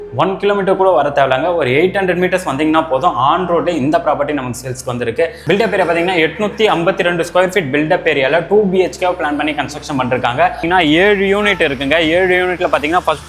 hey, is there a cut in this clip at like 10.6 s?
yes; 2 cuts; at 5.5 s, 10.6 s

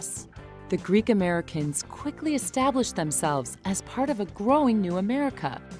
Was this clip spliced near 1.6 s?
yes; 1 cut; at 1.6 s

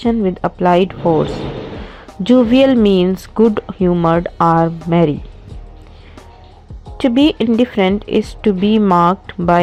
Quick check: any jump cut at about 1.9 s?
no; 0 cuts

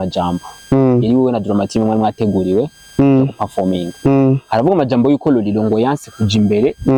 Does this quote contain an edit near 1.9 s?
no; 0 cuts

